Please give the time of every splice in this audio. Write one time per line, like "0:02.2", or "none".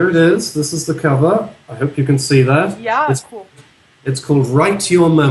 0:01.6

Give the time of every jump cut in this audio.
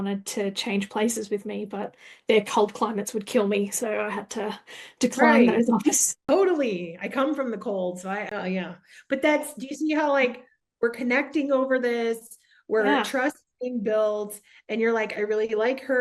0:06.1
0:08.3

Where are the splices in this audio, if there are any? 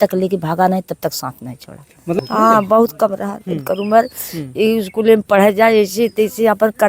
0:02.1

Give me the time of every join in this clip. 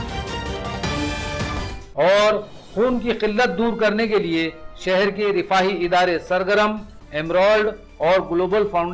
none

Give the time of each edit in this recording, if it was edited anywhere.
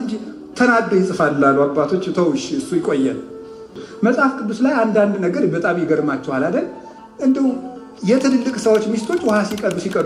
0:03.9

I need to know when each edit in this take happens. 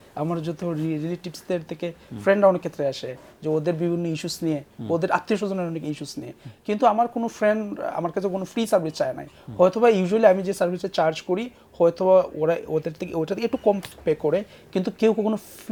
none

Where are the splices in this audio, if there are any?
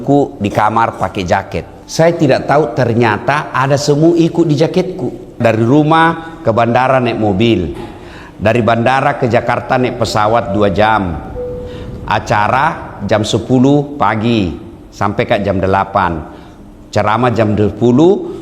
0:01.8
0:05.4

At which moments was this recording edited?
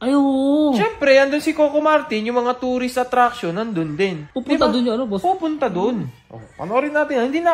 0:00.9
0:04.1

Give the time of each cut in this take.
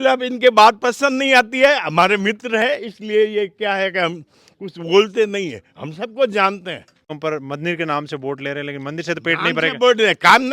0:07.1

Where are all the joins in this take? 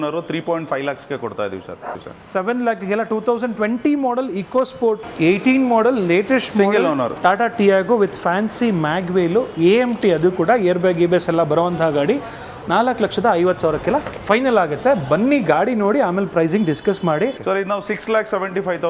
0:02.1
0:05.1
0:17.4

